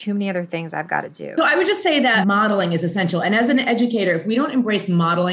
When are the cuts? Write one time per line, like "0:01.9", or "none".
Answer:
0:01.3
0:02.2